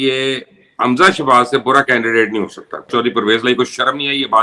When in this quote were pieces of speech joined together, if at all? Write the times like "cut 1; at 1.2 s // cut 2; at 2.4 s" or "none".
cut 1; at 2.9 s